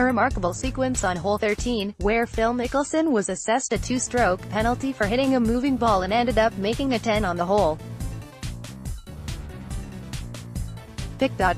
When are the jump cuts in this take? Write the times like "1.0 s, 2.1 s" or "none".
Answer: 7.8 s, 10.6 s